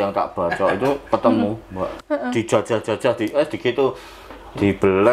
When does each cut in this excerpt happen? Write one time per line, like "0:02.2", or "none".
0:01.9